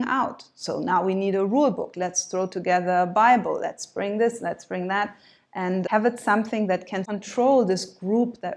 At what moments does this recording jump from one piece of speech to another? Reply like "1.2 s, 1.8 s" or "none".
5.8 s, 7.0 s